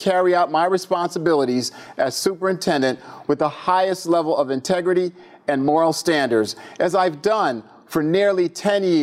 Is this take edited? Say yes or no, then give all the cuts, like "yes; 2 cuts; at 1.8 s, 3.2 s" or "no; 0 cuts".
no; 0 cuts